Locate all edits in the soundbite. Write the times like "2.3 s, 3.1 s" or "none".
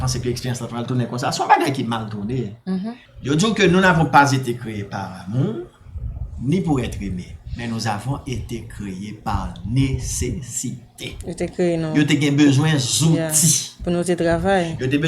3.0 s